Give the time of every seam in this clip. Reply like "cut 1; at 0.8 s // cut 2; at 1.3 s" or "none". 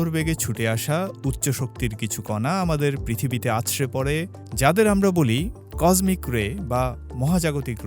none